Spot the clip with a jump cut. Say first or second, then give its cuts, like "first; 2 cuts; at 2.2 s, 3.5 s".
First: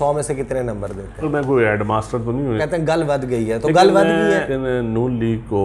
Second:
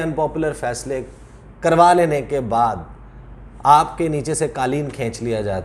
first; 3 cuts; at 1.2 s, 2.6 s, 4.5 s